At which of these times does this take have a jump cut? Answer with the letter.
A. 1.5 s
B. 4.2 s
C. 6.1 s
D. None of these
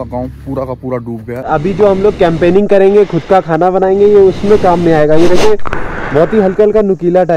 A